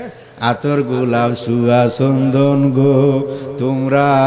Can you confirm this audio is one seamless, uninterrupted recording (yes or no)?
yes